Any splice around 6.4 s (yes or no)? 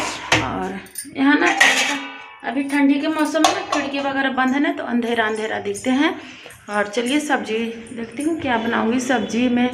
no